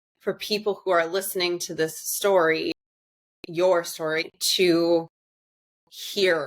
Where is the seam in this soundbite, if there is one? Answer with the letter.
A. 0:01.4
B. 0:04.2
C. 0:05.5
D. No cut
B